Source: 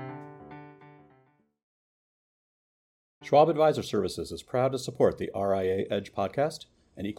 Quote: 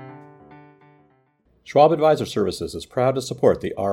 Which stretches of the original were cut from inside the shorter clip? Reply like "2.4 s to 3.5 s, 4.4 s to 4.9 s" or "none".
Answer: 1.7 s to 3.3 s